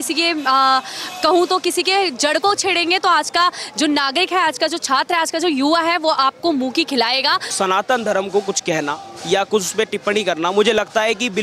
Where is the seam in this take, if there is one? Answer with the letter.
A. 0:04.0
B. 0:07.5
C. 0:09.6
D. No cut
B